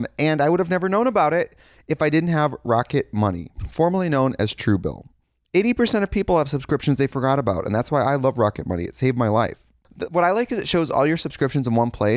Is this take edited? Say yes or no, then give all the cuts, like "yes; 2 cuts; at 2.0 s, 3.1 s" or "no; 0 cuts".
yes; 1 cut; at 9.8 s